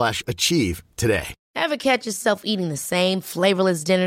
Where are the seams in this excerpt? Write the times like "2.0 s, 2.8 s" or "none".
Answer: none